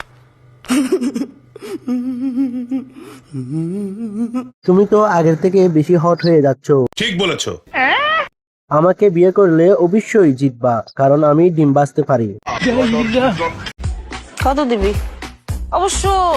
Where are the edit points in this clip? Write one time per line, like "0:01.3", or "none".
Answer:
0:13.7